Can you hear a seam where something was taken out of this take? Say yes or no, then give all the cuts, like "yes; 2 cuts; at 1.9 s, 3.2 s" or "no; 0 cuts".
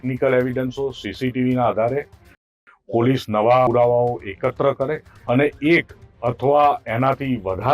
yes; 1 cut; at 5.1 s